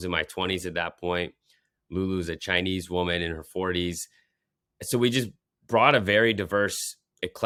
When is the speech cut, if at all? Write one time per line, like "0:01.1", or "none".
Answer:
none